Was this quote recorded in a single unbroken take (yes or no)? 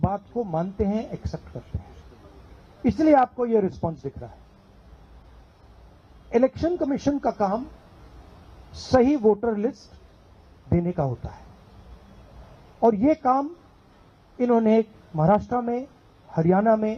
yes